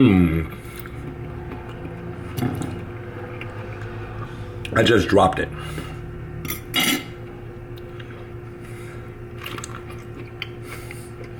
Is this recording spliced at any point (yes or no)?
no